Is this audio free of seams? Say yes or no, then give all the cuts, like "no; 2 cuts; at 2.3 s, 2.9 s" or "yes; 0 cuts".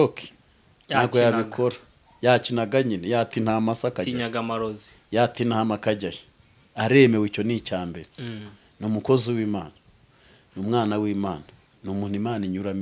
yes; 0 cuts